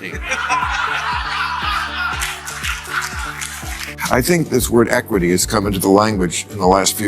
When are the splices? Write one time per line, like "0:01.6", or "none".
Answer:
0:03.9